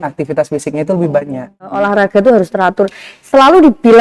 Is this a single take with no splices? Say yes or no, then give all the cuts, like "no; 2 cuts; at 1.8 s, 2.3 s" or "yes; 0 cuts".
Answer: no; 1 cut; at 1.6 s